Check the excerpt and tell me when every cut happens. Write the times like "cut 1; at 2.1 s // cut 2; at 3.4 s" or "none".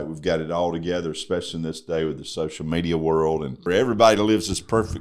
cut 1; at 3.6 s